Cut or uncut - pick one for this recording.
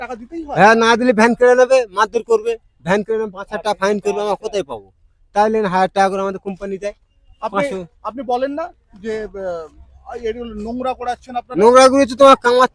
uncut